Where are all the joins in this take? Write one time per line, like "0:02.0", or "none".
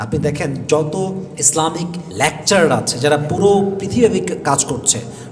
0:02.0